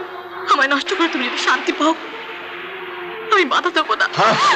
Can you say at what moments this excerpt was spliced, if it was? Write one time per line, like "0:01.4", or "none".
none